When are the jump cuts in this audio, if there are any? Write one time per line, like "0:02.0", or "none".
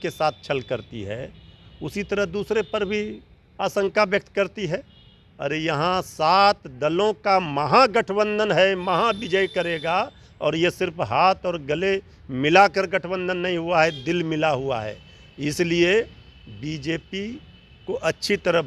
none

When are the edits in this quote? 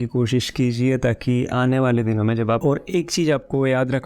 0:02.6

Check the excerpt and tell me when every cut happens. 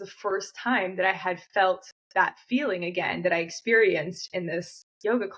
none

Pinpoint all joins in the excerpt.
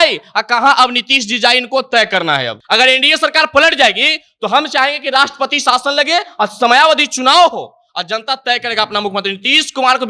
0:02.5

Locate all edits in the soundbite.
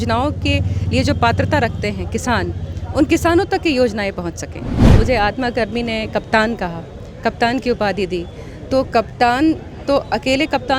0:04.9

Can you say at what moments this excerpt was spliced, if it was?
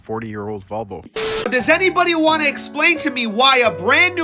0:01.2

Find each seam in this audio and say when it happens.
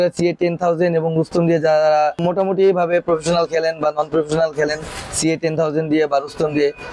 0:02.2

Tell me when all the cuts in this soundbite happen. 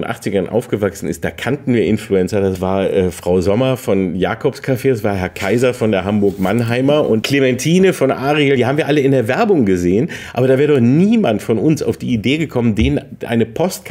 0:02.6
0:07.2
0:08.6

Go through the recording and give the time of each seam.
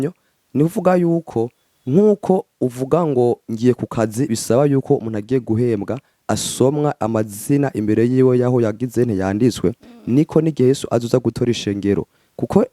none

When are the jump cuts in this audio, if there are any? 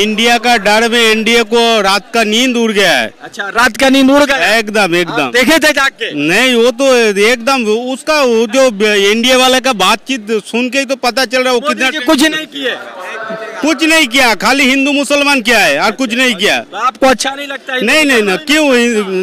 none

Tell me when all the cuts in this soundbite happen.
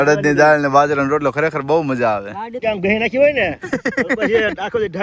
0:02.6

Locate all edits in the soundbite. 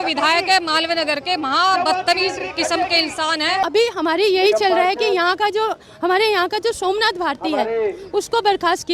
0:03.6

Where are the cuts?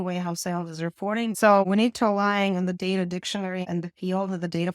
0:01.3
0:03.6

